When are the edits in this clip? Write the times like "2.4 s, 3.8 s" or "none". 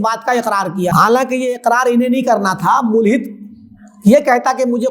0.9 s